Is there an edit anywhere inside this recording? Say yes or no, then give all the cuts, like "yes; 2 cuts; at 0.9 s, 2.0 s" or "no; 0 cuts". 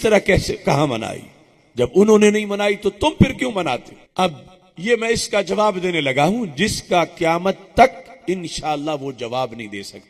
yes; 1 cut; at 4.0 s